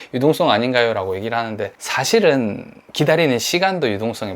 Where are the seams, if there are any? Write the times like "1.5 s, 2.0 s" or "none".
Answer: 1.8 s